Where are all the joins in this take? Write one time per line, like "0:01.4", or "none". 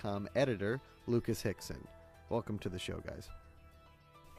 0:01.8